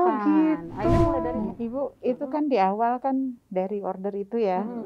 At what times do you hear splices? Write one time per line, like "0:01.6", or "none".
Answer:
0:01.3